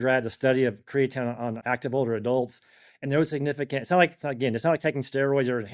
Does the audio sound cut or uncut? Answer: cut